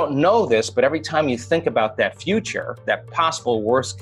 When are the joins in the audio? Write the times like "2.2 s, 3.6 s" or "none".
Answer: 3.1 s